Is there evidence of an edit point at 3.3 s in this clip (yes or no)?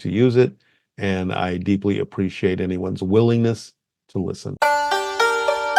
no